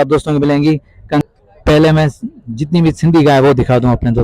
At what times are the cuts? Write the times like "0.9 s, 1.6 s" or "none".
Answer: 1.2 s

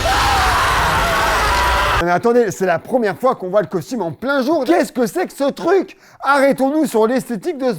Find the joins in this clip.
2.0 s, 4.6 s

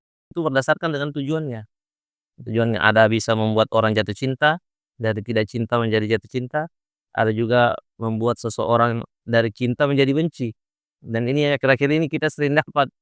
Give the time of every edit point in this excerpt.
none

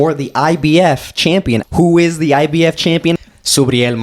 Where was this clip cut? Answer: 1.6 s, 3.1 s

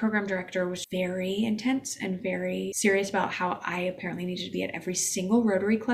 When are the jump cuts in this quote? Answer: 0.8 s, 2.7 s

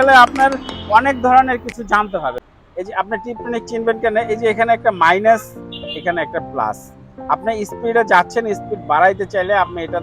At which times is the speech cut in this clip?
2.5 s

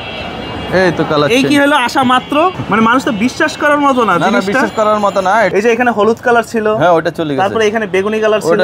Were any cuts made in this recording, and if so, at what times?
2.5 s, 5.5 s

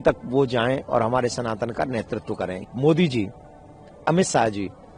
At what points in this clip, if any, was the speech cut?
2.6 s

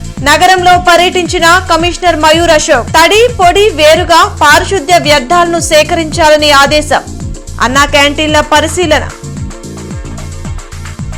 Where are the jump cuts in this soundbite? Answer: none

